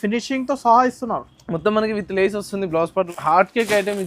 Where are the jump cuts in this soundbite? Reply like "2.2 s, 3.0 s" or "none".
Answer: 3.1 s